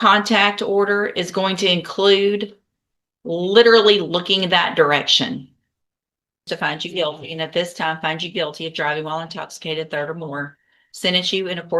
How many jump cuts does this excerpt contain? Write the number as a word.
one